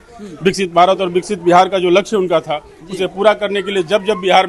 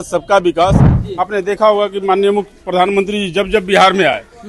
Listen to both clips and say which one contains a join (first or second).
second